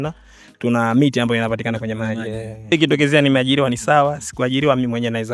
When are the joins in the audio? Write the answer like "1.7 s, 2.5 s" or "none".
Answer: 2.7 s